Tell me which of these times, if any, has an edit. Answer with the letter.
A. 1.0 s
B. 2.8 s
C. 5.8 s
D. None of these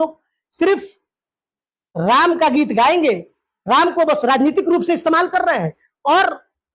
D